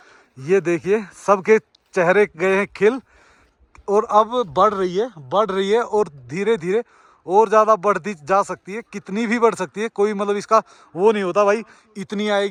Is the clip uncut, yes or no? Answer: yes